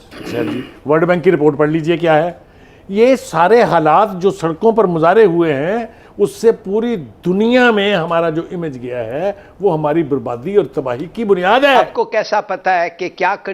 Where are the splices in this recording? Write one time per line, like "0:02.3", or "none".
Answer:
0:11.8